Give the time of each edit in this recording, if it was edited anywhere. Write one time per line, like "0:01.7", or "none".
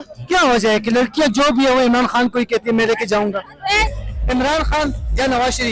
0:04.0